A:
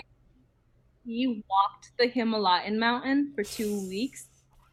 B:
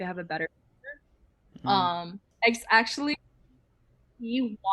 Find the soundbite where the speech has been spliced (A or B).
B